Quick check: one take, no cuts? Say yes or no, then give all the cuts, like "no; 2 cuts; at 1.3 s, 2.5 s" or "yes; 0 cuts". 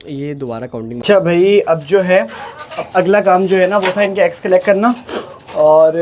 no; 1 cut; at 1.0 s